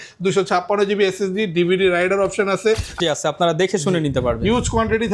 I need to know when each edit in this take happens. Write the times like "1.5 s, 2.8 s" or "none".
2.9 s